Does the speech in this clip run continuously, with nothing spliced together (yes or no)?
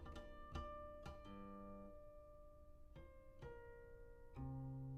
yes